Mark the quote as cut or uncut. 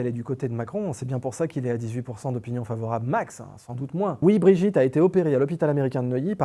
cut